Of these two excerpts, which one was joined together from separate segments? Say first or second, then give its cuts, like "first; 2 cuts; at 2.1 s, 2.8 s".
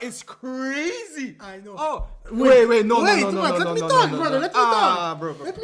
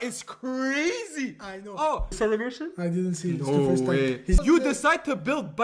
second; 2 cuts; at 2.1 s, 4.4 s